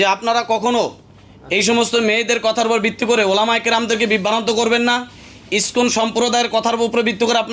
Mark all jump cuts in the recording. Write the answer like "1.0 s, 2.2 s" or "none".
none